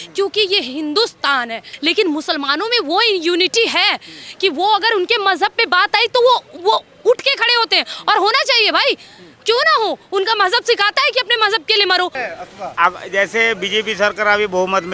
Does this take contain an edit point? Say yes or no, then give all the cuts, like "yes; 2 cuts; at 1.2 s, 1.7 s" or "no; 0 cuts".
yes; 2 cuts; at 1.7 s, 12.2 s